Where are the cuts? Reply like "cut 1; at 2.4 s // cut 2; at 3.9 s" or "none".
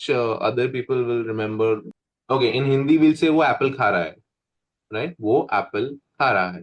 cut 1; at 1.9 s